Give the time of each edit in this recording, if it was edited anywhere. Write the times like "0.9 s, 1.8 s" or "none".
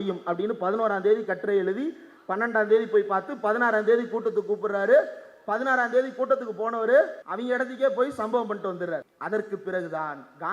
7.2 s, 9.1 s